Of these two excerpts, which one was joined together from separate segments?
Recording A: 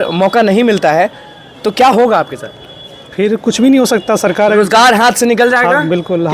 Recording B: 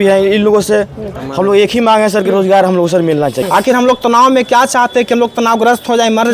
B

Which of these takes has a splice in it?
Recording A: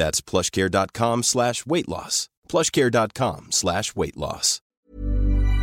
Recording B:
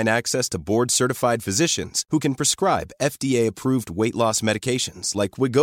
A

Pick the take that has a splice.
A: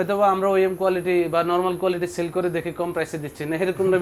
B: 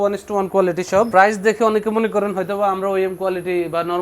B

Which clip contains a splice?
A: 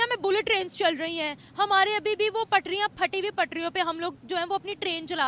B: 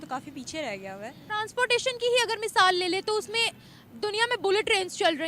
B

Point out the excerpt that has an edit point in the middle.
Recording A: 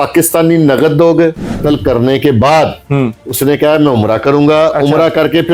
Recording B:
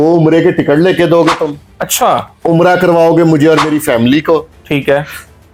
A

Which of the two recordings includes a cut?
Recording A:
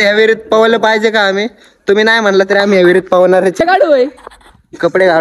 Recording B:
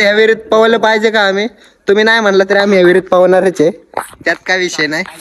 A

